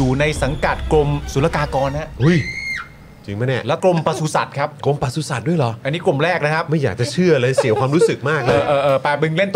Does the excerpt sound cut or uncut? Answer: uncut